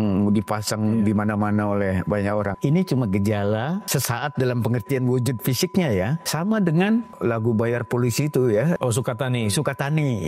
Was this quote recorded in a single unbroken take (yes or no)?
no